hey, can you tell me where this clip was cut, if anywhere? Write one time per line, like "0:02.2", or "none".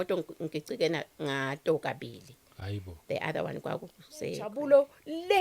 0:04.5